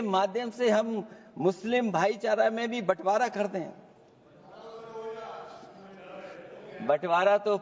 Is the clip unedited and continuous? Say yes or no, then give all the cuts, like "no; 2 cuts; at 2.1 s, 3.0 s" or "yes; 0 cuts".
yes; 0 cuts